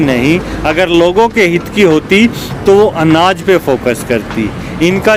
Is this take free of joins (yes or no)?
yes